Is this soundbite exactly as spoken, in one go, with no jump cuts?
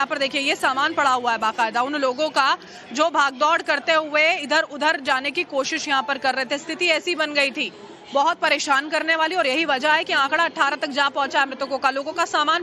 no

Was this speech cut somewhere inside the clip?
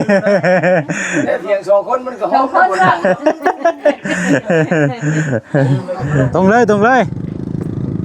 yes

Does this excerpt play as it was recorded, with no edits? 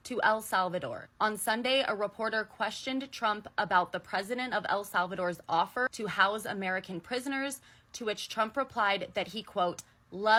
yes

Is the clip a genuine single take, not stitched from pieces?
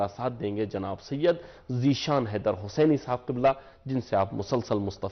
yes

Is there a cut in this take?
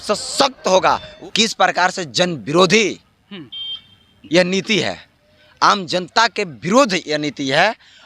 yes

